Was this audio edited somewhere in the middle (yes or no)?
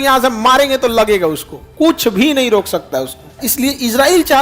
yes